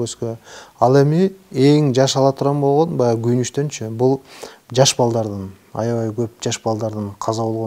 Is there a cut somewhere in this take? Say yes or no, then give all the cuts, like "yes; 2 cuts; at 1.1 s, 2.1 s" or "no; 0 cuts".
no; 0 cuts